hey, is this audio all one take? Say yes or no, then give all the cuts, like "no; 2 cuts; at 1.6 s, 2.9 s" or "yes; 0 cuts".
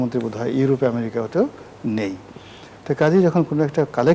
yes; 0 cuts